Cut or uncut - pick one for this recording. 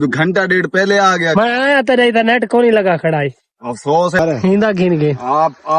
cut